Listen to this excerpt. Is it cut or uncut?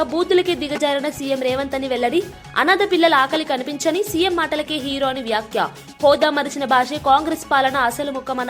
uncut